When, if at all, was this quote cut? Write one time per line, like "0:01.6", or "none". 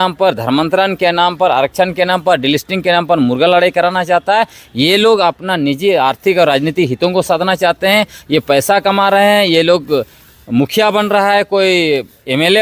none